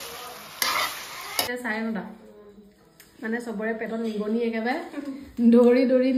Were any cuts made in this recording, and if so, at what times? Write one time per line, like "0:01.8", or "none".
0:01.5